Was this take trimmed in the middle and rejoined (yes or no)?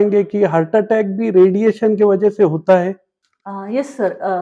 no